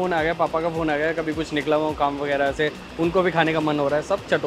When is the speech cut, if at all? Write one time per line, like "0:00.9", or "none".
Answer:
none